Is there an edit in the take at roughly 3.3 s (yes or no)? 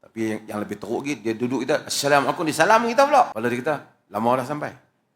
yes